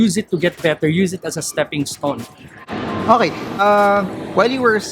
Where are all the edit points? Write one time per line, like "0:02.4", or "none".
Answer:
none